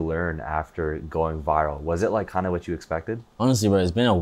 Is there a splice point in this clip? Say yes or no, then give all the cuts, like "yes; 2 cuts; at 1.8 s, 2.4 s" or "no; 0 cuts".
no; 0 cuts